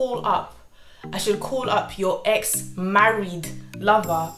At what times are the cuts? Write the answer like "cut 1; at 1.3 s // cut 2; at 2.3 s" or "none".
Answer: none